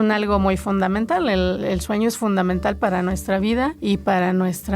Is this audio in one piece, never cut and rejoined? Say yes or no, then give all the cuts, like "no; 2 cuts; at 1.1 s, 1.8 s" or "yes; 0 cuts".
no; 2 cuts; at 1.6 s, 2.8 s